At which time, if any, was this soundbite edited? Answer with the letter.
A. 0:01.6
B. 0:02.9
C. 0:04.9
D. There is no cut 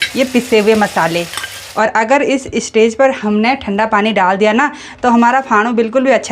A